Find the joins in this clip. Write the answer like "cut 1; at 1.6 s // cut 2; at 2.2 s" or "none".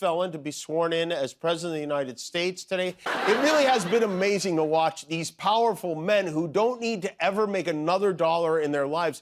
cut 1; at 2.6 s